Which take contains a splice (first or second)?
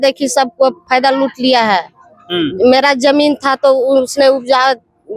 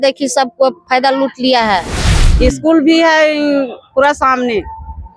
second